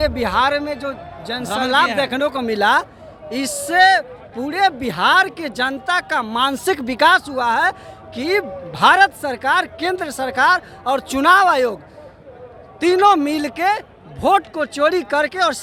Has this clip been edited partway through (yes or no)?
no